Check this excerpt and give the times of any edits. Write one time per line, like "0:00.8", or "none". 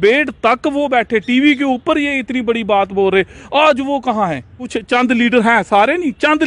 0:04.7